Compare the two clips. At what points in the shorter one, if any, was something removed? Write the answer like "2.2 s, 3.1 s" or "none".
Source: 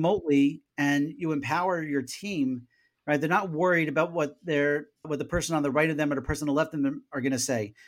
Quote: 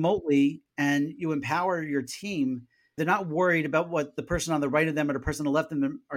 3.0 s, 4.2 s